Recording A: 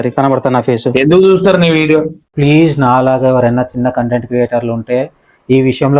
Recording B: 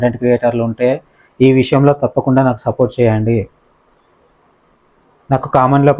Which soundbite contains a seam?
A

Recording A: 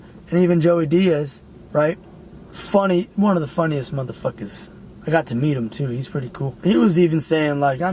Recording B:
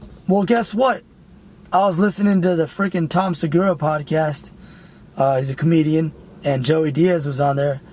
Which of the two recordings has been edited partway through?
A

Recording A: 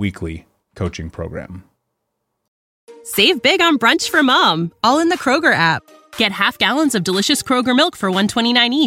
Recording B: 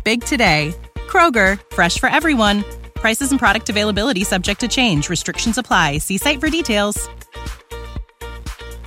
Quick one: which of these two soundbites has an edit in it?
A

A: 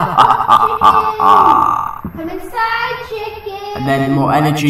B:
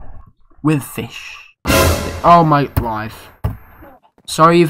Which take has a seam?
B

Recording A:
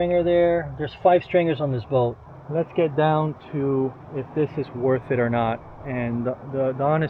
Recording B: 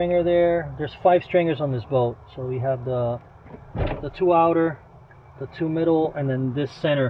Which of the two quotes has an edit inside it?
A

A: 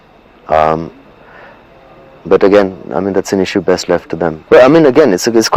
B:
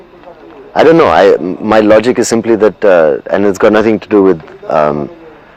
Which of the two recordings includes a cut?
A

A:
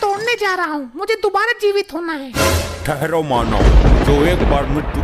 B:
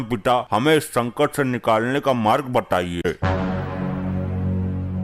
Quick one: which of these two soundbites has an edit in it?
B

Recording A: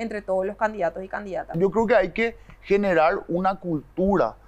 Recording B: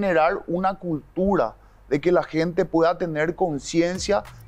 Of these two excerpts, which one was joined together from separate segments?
A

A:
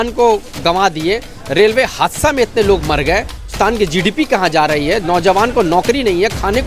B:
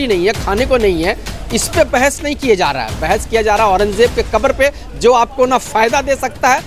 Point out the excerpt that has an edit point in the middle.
A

